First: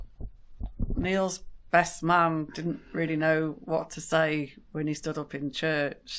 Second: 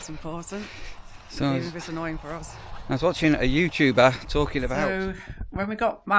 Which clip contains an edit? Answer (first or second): second